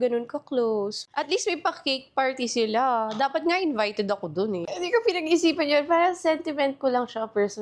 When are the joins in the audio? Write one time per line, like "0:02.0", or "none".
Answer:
0:01.0
0:04.7